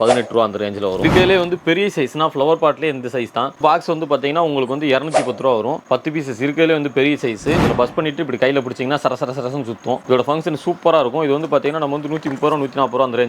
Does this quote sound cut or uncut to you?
cut